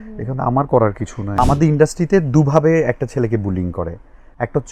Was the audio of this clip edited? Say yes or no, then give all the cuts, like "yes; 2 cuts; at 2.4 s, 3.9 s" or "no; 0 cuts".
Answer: yes; 1 cut; at 1.4 s